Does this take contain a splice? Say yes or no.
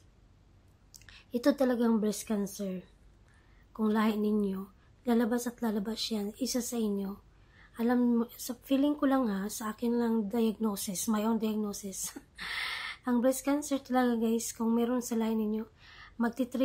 no